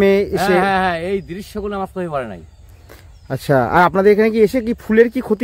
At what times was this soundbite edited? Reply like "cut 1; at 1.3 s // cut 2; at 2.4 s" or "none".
none

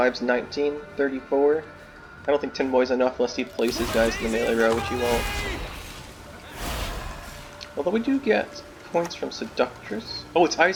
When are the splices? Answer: none

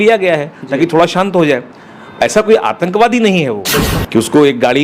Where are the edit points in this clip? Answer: cut 1; at 3.8 s

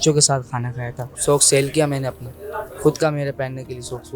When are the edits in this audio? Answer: cut 1; at 1.1 s

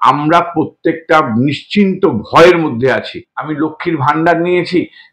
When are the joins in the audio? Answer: cut 1; at 3.3 s

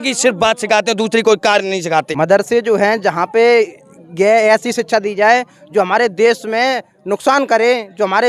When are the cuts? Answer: cut 1; at 2.1 s

